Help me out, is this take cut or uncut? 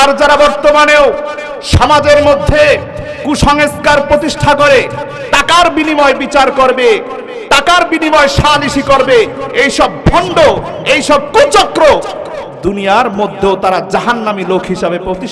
uncut